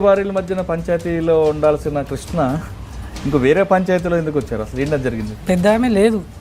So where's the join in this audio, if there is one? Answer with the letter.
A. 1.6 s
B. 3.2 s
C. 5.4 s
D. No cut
C